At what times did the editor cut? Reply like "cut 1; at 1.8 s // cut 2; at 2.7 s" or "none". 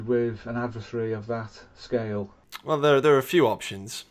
cut 1; at 2.5 s